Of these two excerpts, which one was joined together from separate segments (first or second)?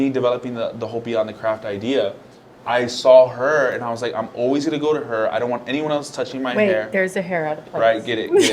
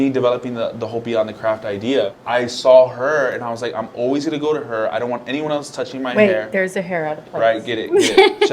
second